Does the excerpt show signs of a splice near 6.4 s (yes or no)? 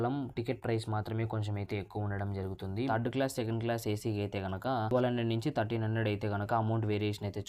no